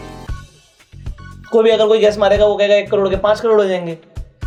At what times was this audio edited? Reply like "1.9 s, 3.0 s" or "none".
none